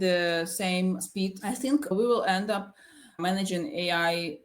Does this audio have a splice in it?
yes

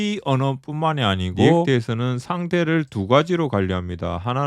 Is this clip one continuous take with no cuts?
no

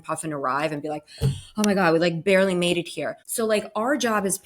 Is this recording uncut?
no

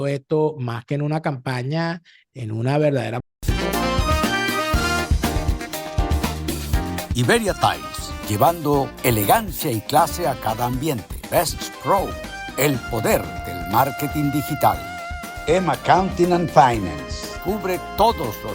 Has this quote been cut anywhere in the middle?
yes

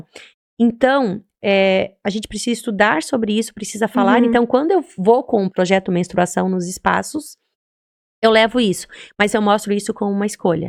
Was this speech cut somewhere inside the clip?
no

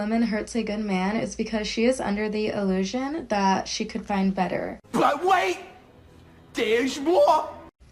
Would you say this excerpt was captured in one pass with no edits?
yes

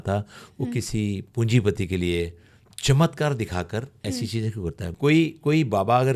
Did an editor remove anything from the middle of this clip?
yes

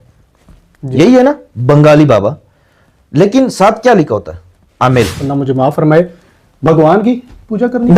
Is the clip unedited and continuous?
no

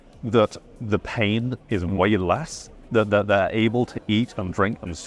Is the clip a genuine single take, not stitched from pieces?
yes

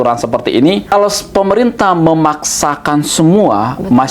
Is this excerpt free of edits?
no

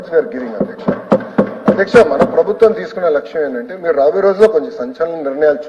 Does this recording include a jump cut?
no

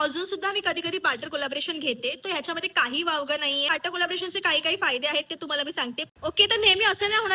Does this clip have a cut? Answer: yes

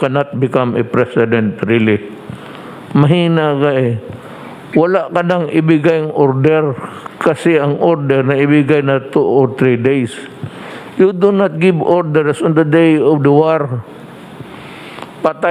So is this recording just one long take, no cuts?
yes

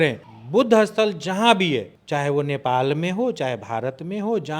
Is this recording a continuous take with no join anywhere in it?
no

